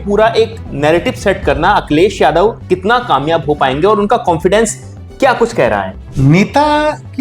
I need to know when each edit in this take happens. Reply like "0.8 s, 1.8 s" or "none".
6.0 s